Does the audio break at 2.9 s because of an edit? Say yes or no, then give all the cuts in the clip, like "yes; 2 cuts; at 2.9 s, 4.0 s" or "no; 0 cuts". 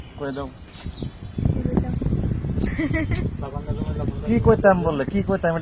no; 0 cuts